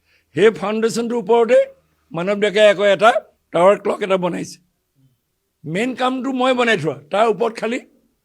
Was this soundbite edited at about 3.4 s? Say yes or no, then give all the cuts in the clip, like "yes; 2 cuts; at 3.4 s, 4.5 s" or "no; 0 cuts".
yes; 1 cut; at 3.4 s